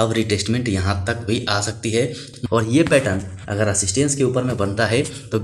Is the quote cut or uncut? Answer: cut